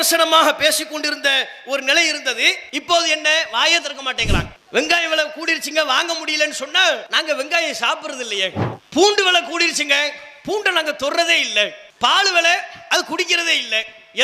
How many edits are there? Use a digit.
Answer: 2